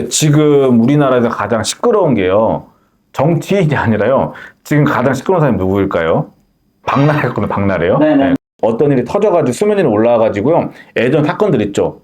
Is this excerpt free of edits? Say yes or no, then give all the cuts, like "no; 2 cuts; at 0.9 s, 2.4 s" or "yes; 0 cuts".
no; 1 cut; at 8.5 s